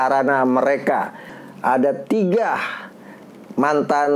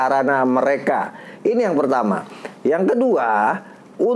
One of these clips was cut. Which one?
first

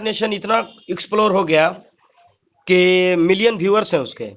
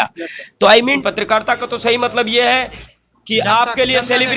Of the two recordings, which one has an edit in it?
second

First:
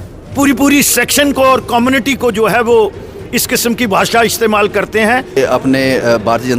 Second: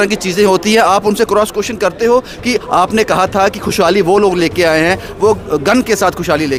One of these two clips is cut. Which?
first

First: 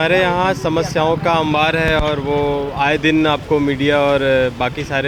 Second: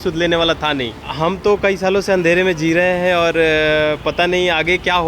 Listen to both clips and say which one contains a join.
second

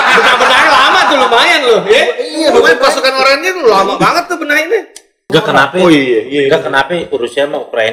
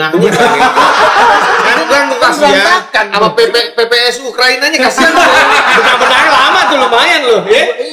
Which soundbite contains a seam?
first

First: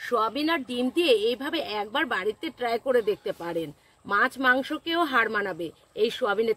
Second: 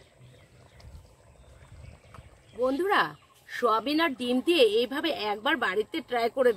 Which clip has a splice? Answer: second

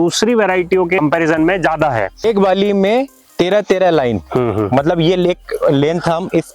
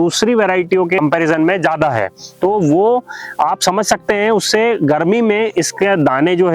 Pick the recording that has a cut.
first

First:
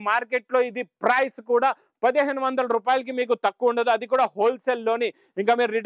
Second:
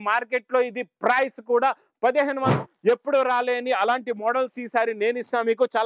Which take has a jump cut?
second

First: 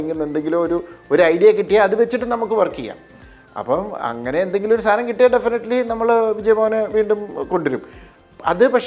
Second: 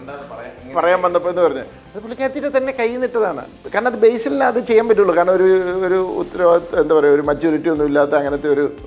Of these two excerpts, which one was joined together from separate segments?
second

